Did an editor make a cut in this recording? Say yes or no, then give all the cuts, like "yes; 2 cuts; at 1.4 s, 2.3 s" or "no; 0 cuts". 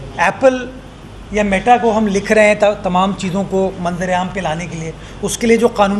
no; 0 cuts